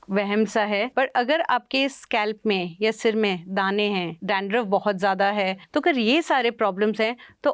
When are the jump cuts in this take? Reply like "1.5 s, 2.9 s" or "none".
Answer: 0.9 s, 4.2 s, 5.6 s